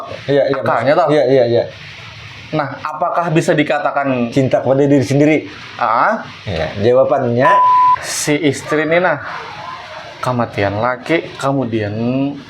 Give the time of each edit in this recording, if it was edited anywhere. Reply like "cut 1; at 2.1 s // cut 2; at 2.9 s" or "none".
cut 1; at 7.7 s